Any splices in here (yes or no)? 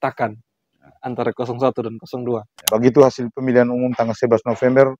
yes